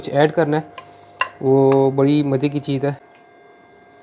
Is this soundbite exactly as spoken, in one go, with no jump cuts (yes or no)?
no